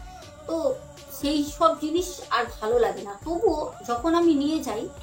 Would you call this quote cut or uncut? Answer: cut